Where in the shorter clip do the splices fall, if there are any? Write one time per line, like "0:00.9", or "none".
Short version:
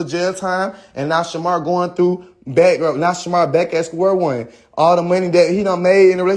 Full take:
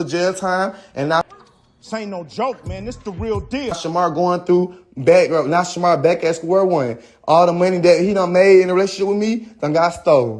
0:01.3